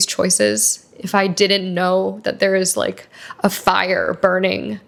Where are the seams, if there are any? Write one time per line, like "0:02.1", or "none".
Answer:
none